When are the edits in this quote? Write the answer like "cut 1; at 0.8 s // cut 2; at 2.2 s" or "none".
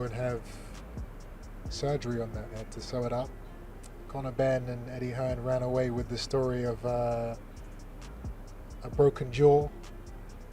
cut 1; at 3.8 s